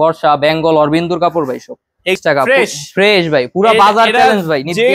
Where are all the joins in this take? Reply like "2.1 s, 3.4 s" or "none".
2.1 s

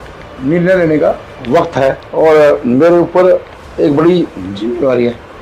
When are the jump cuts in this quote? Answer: 2.0 s, 3.6 s

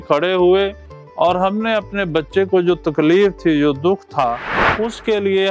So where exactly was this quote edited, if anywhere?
none

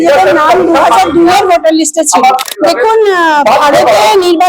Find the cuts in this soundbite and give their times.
2.4 s

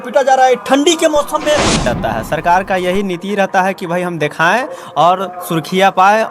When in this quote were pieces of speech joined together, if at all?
1.8 s

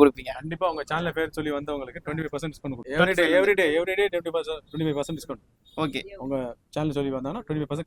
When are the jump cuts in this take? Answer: 2.8 s

